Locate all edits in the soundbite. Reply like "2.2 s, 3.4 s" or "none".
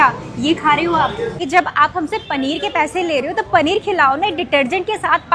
1.4 s